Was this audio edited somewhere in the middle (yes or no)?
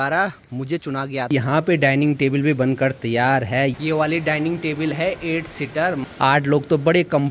yes